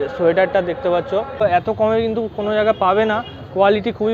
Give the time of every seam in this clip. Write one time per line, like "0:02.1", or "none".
0:01.4